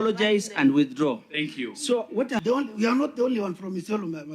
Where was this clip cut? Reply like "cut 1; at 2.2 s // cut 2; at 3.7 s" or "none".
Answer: cut 1; at 2.4 s